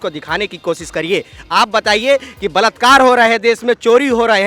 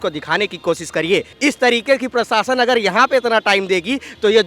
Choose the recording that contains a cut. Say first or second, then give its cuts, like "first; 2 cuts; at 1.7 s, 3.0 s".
second; 1 cut; at 1.3 s